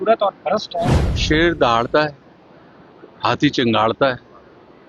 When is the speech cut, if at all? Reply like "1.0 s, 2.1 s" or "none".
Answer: 1.2 s